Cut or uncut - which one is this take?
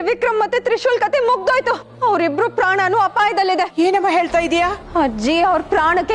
cut